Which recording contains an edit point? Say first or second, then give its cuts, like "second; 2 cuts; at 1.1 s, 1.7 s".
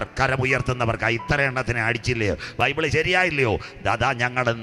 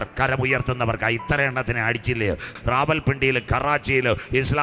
second; 1 cut; at 2.6 s